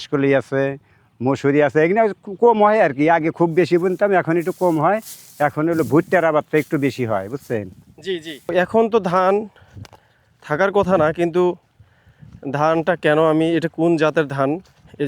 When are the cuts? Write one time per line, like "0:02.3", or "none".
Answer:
0:08.5

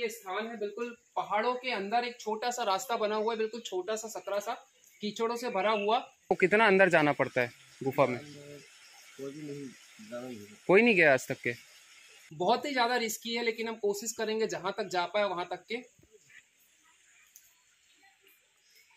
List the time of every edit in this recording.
0:06.3
0:12.2

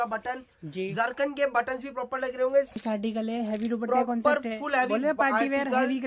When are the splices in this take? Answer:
0:02.8

